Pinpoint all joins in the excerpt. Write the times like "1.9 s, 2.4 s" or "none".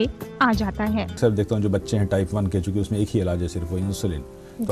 1.2 s